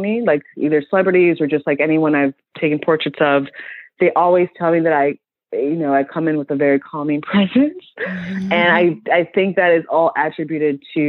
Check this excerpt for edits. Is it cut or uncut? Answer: uncut